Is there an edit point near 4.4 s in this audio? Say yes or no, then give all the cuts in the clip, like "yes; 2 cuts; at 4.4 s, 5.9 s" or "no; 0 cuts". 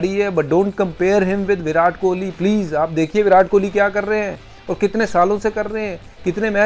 no; 0 cuts